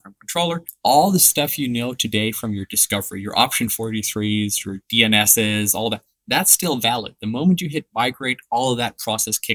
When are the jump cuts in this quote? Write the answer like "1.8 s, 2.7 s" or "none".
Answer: none